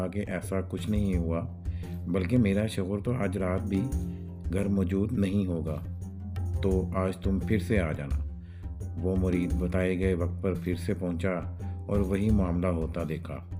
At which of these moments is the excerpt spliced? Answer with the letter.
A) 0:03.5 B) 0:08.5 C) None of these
C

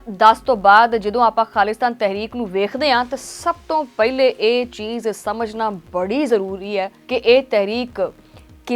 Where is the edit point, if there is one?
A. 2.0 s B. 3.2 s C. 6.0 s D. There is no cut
D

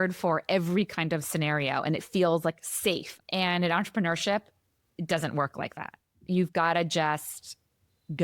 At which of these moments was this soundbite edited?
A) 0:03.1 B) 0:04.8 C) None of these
A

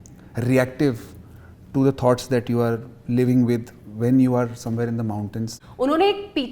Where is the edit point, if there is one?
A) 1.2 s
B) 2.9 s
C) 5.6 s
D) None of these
C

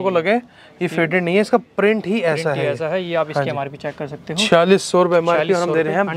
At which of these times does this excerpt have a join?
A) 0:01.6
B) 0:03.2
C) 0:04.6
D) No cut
D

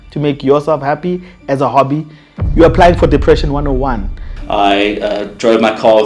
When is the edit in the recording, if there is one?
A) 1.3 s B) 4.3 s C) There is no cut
B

